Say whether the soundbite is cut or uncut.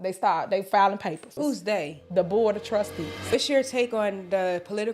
cut